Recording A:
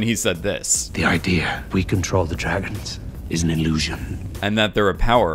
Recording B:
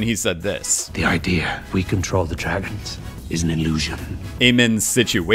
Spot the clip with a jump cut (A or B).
B